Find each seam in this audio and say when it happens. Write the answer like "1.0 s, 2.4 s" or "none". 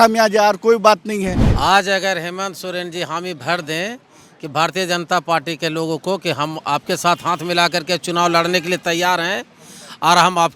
1.4 s